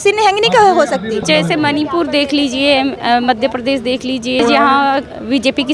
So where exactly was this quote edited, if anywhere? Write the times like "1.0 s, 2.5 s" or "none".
1.2 s, 4.4 s

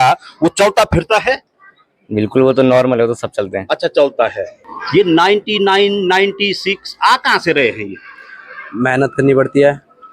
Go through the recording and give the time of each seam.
4.5 s

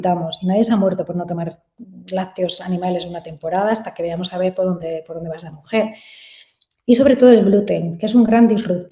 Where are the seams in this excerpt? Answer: none

